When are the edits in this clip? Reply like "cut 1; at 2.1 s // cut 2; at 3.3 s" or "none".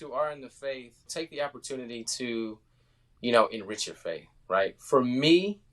cut 1; at 1.1 s